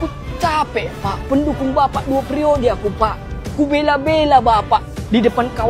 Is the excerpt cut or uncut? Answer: uncut